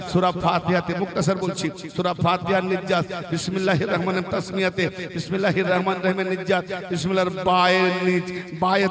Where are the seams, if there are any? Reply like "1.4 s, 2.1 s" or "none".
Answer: none